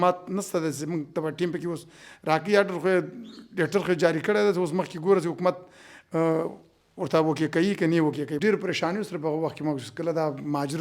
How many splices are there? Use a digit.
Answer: 1